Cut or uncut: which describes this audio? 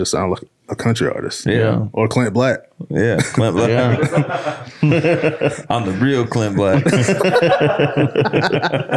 cut